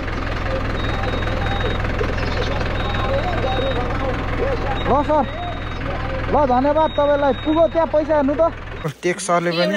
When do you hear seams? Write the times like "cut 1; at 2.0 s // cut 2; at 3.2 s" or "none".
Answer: cut 1; at 8.8 s